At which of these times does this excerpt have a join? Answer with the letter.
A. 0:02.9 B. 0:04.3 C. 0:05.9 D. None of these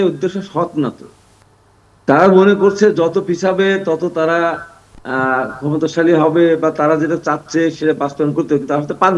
D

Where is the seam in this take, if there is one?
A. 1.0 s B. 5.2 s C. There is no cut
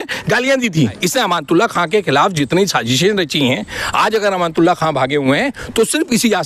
A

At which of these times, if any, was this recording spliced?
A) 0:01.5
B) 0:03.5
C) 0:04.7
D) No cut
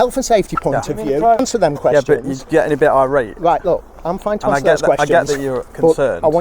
A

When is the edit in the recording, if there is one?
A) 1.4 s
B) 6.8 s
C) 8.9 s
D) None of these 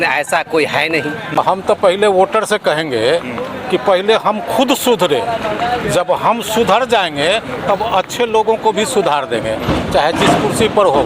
A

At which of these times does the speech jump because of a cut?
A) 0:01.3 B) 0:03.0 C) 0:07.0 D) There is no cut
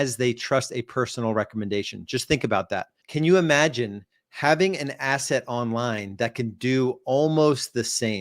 B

